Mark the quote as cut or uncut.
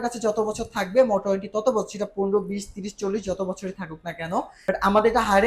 cut